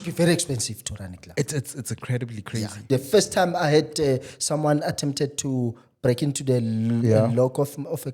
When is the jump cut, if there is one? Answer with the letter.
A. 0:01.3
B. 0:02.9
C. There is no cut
B